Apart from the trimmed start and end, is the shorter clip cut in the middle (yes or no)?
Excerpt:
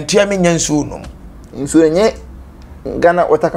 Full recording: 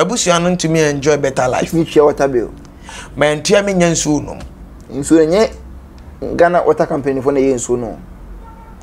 no